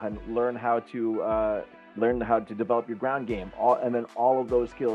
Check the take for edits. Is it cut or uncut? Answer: cut